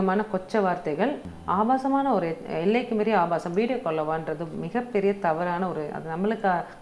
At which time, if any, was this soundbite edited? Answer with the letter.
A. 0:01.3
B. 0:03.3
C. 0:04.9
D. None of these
A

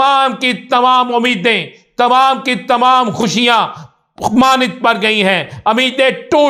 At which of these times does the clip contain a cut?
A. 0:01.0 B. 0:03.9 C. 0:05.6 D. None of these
D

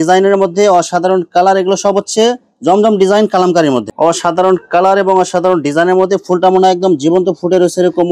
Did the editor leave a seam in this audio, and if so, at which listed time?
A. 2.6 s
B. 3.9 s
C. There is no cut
B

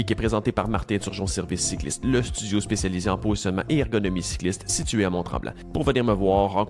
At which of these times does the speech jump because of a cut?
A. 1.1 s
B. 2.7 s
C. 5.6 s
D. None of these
C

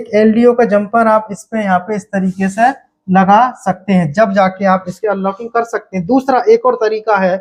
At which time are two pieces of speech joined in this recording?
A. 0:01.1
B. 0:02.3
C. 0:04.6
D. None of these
D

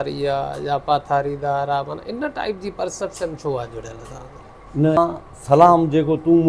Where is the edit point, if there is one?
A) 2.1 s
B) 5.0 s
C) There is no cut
B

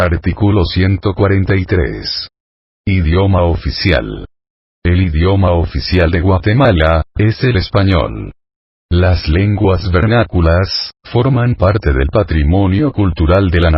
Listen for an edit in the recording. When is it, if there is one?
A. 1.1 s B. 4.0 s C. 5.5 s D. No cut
A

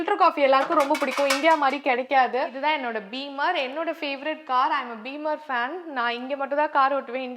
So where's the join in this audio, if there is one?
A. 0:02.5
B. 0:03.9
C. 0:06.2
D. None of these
A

